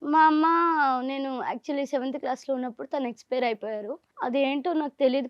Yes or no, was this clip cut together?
yes